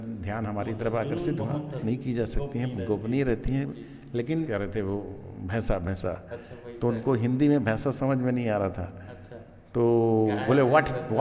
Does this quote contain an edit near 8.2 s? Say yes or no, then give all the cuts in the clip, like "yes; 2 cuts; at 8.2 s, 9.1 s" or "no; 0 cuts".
no; 2 cuts; at 1.8 s, 4.5 s